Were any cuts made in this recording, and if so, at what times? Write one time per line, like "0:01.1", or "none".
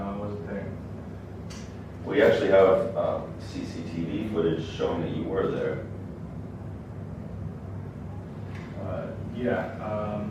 none